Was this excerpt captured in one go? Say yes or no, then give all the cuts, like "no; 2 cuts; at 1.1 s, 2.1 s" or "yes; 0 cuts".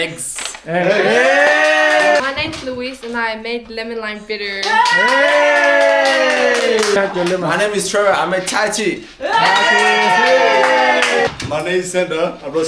no; 3 cuts; at 2.2 s, 6.9 s, 11.3 s